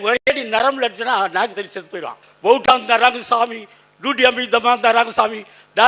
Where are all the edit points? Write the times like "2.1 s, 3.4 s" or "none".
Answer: 2.2 s